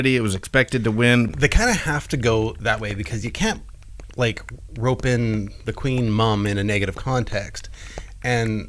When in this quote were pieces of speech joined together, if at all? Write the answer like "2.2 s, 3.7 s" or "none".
1.3 s